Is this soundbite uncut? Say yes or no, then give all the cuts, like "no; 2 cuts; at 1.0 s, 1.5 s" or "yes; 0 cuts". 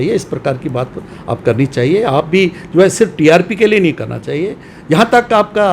yes; 0 cuts